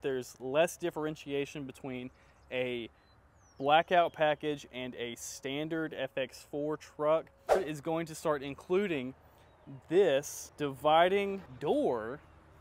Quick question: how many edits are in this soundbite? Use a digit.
3